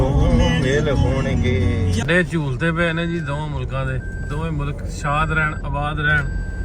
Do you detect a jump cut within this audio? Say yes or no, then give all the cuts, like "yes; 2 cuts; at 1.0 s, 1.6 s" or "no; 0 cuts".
yes; 1 cut; at 2.0 s